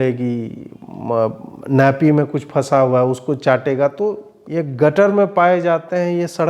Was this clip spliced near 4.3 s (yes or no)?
yes